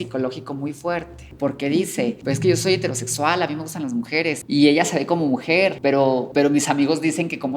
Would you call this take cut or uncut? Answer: cut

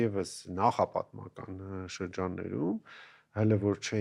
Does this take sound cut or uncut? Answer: uncut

